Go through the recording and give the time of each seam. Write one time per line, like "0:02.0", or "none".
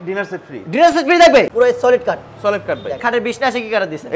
0:01.5
0:03.0